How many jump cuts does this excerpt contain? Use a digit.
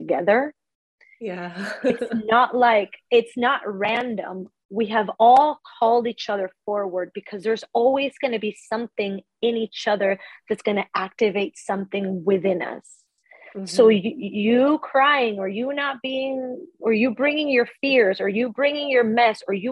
0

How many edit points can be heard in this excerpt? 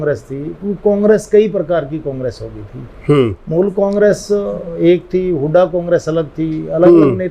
0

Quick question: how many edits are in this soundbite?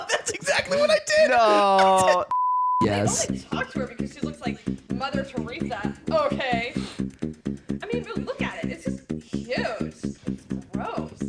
1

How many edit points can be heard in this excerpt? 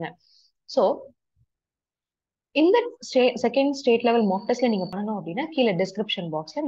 1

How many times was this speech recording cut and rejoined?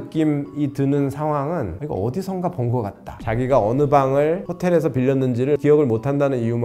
1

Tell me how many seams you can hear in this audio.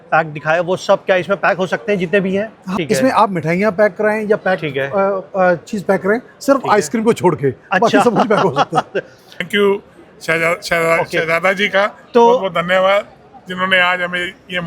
2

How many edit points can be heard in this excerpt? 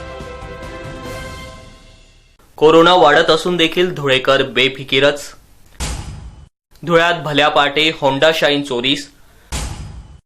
1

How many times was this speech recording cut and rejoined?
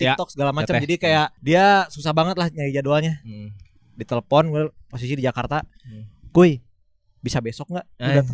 1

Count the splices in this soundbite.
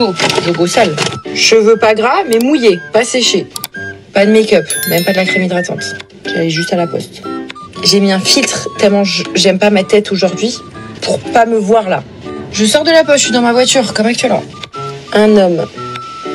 1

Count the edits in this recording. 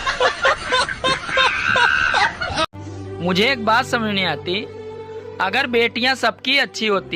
1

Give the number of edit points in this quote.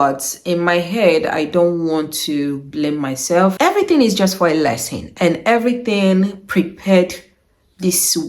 1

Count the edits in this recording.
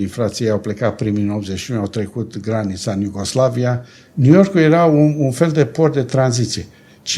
1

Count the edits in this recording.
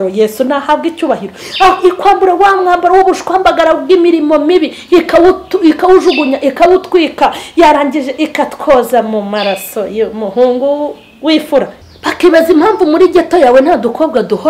1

